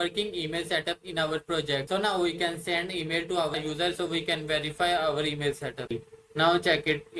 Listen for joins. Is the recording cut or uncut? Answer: cut